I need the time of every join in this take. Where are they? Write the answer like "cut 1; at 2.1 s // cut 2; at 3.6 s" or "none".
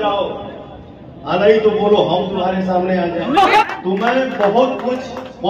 cut 1; at 3.6 s